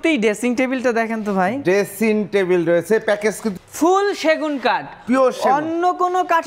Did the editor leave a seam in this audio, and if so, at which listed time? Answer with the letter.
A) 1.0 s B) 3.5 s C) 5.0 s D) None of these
B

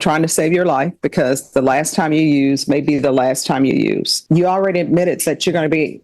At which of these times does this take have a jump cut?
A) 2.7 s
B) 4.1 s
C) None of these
B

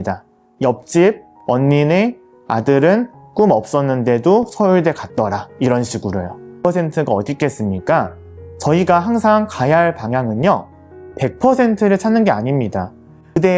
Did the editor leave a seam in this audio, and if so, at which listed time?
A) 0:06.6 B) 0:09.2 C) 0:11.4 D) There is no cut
A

